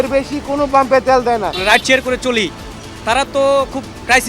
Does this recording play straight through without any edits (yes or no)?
no